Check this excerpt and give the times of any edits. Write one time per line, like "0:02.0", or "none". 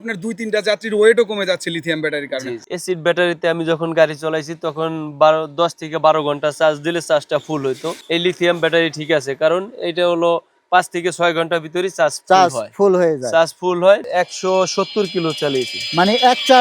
0:02.6
0:07.9
0:14.0